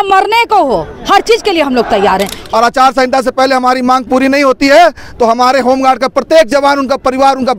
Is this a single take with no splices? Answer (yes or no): no